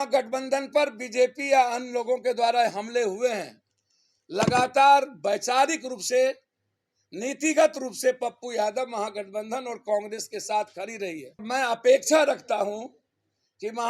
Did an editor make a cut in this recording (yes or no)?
yes